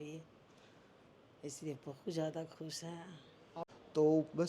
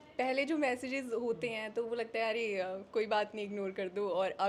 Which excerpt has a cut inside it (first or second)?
first